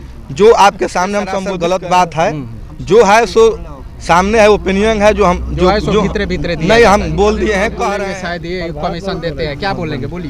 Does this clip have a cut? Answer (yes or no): yes